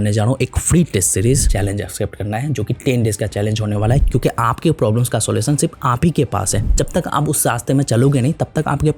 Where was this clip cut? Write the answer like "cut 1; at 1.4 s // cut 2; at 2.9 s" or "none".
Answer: cut 1; at 1.5 s // cut 2; at 4.0 s // cut 3; at 6.7 s

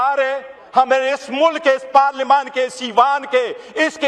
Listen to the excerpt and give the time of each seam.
none

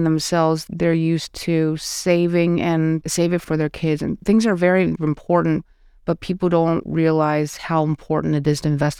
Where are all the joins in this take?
cut 1; at 3.4 s

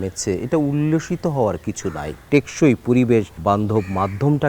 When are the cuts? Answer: cut 1; at 2.3 s // cut 2; at 3.3 s

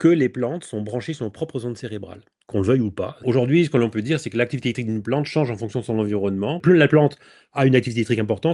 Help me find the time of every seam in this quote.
cut 1; at 3.2 s // cut 2; at 6.6 s

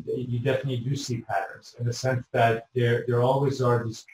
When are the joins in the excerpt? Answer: none

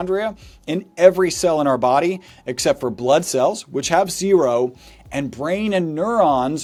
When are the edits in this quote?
none

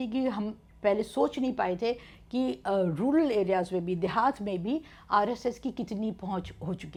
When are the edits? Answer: none

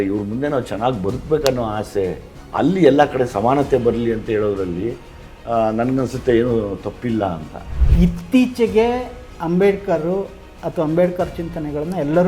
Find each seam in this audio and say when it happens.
cut 1; at 7.8 s

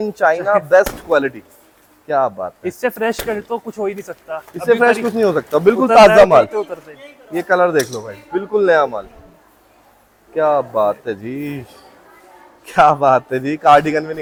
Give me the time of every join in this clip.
none

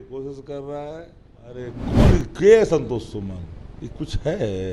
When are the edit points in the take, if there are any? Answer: cut 1; at 1.8 s

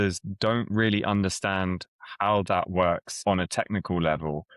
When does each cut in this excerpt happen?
cut 1; at 3.2 s

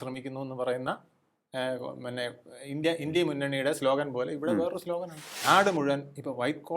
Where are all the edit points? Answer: cut 1; at 5.3 s

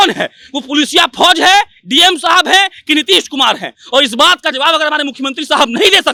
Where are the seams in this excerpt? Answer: none

